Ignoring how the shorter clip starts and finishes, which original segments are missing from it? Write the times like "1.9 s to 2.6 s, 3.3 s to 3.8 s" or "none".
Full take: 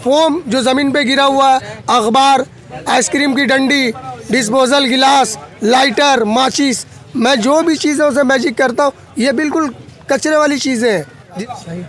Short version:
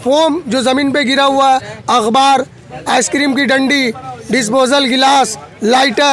none

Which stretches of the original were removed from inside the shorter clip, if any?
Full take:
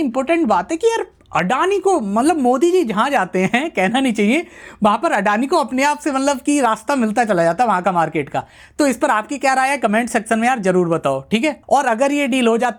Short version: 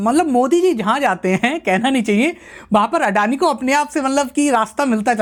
none

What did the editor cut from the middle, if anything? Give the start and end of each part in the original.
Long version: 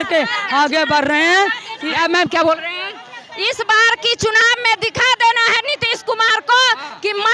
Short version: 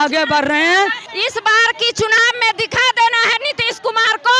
1.7 s to 3.3 s

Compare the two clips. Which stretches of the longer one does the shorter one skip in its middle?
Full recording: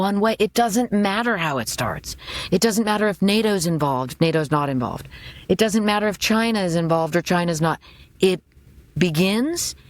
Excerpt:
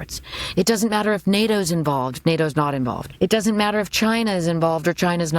5.0 s to 5.3 s

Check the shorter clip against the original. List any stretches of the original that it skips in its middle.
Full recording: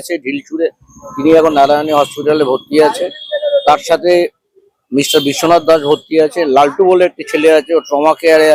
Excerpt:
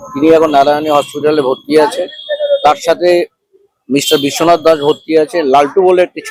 none

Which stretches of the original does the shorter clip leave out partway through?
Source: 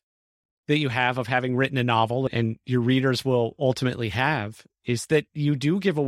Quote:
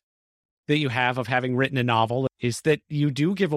2.3 s to 4.8 s

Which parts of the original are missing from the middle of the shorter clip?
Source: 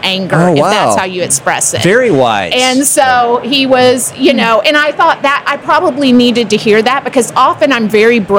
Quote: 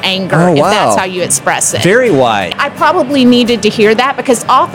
2.5 s to 5.4 s

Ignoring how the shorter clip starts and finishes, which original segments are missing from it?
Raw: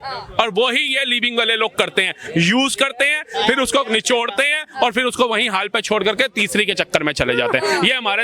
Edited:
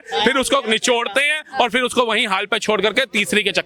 none

